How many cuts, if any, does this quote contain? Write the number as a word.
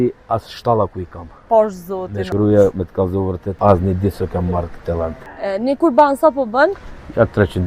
three